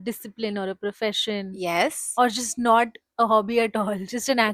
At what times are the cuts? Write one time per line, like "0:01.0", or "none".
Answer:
none